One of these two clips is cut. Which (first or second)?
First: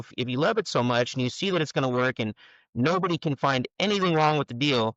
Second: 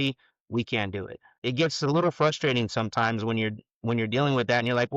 second